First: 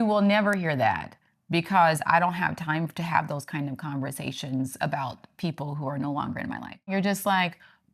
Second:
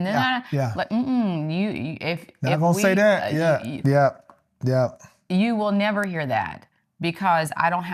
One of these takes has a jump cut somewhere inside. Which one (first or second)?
first